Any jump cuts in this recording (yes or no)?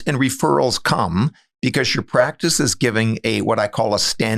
no